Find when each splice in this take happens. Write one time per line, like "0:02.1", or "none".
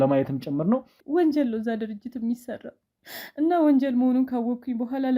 0:00.9